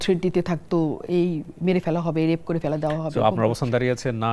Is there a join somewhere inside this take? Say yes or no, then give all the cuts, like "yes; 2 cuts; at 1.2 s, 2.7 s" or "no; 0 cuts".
no; 0 cuts